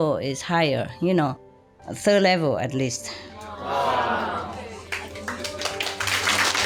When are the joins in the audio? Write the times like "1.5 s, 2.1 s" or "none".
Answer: none